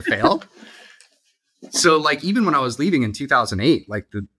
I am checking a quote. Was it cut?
no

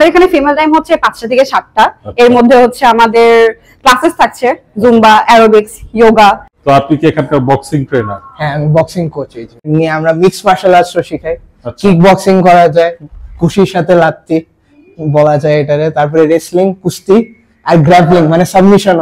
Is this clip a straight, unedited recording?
no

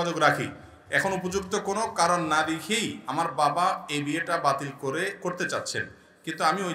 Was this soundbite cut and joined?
no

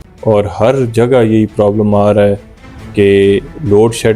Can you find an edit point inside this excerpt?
no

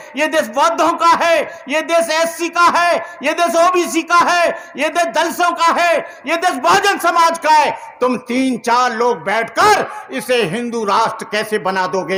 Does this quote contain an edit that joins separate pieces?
no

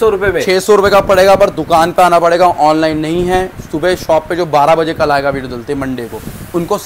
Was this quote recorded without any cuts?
yes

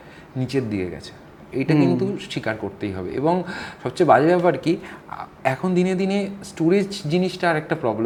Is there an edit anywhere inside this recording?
no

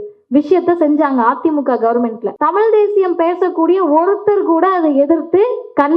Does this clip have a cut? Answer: yes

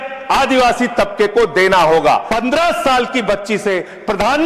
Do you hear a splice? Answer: yes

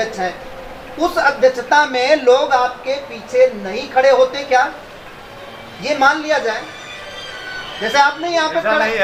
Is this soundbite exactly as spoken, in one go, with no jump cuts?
yes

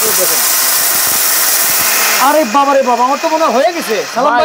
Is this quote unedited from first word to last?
no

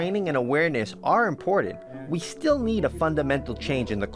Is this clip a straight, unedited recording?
yes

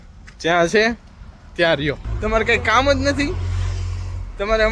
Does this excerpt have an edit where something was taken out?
yes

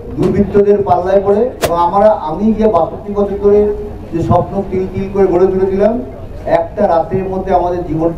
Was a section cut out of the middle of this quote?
yes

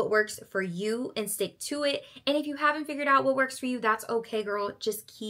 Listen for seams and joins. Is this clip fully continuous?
yes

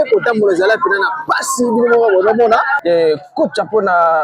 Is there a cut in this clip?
yes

